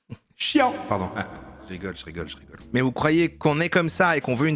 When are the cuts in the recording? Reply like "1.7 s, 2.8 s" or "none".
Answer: 2.3 s